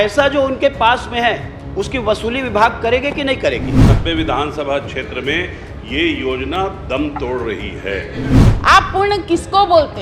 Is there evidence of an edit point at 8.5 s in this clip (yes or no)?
yes